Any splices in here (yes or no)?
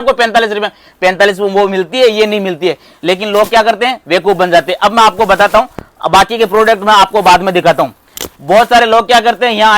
no